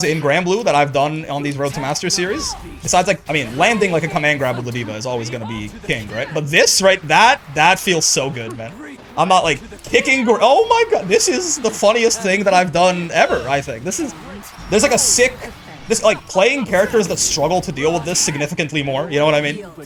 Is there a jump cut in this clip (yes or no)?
no